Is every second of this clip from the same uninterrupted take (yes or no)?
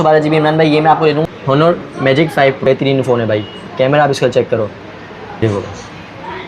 no